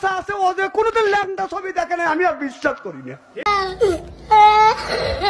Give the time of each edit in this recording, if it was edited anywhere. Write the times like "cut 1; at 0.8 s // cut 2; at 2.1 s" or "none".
cut 1; at 3.4 s